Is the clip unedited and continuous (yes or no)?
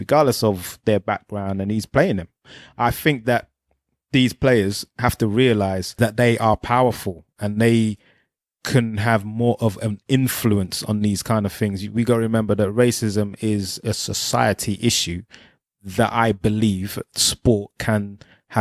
no